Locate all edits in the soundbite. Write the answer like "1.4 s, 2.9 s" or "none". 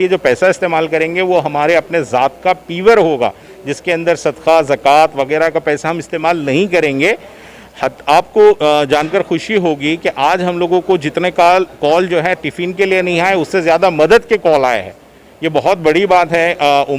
none

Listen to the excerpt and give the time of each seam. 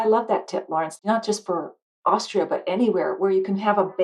0.9 s

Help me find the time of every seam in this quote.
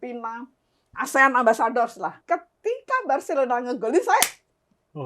2.2 s

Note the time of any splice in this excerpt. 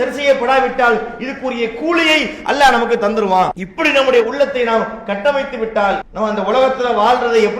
3.6 s, 6.1 s

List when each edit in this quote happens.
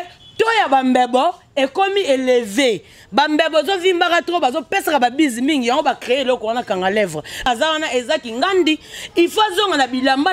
7.5 s

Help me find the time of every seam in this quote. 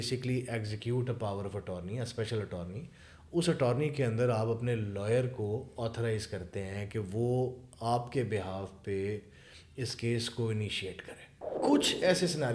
11.4 s

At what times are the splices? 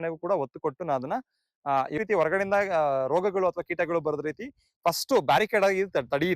2.0 s

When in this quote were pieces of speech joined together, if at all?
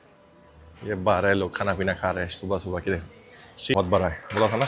3.7 s

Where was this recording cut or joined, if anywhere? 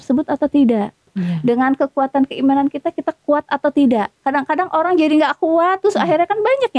1.1 s

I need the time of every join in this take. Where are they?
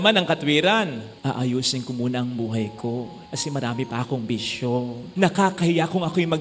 1.1 s, 5.0 s

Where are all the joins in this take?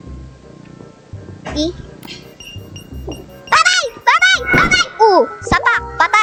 none

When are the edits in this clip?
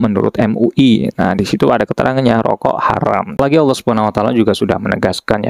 3.6 s

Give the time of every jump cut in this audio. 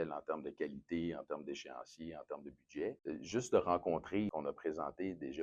3.0 s, 4.3 s

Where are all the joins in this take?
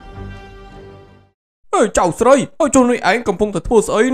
1.1 s

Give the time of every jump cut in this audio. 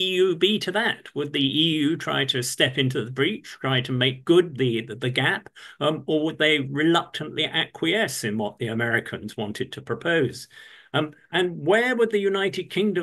none

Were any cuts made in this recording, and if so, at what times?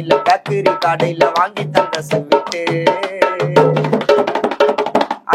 none

